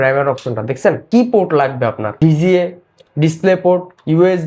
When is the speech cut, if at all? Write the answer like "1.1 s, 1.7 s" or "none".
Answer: 1.0 s